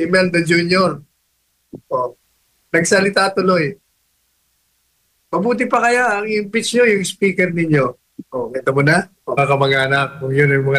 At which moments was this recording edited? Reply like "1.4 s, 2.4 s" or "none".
9.4 s